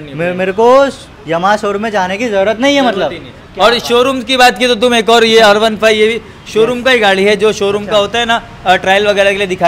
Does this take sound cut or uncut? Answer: uncut